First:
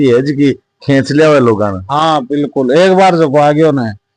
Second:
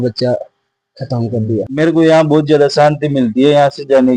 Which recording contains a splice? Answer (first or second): second